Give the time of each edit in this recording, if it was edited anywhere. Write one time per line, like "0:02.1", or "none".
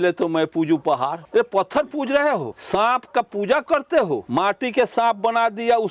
0:01.2
0:02.5
0:04.2